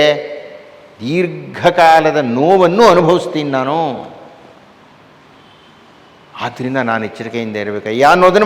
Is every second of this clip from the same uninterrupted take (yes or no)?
yes